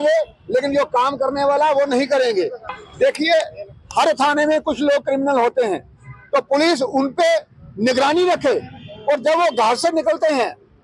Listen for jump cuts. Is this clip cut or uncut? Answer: cut